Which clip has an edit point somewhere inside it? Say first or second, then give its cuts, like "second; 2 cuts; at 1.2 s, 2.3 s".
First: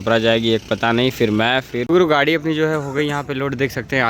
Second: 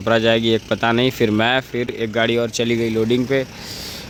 first; 1 cut; at 1.8 s